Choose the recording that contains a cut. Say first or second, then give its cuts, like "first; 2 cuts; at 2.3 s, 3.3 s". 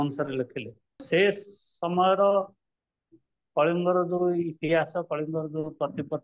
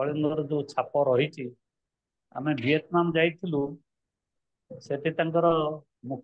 first; 1 cut; at 1.0 s